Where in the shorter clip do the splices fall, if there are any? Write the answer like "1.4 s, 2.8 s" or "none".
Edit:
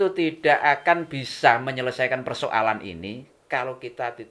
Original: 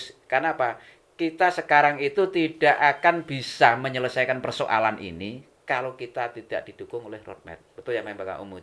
none